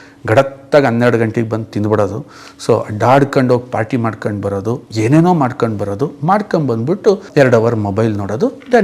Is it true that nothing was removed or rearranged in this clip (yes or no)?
no